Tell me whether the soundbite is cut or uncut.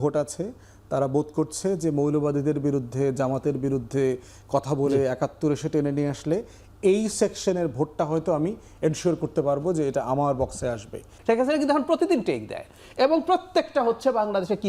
cut